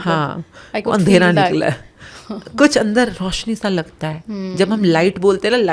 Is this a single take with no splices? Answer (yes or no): yes